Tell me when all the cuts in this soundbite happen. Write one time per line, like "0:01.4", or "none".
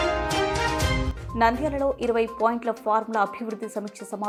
none